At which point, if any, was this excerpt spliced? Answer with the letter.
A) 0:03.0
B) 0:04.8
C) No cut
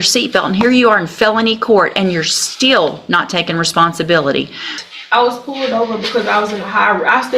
B